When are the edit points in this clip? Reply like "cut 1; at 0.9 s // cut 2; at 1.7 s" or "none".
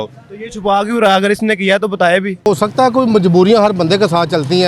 cut 1; at 2.5 s